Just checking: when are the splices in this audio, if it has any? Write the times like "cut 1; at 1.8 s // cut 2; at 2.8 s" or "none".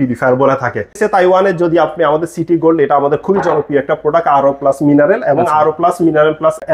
cut 1; at 0.9 s